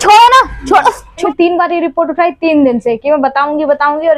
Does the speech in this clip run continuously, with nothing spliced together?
no; 1 cut; at 1.2 s

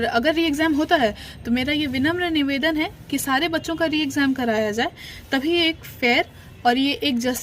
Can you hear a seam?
no; 0 cuts

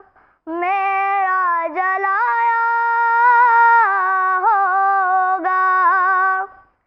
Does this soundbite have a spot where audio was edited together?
no; 0 cuts

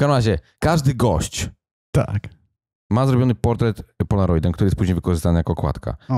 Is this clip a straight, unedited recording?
yes; 0 cuts

